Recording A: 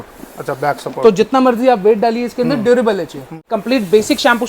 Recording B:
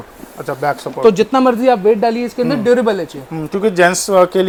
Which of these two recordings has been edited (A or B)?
A